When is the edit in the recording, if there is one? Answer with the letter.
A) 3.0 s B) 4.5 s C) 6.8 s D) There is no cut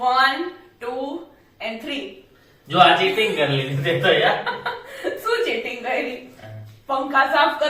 D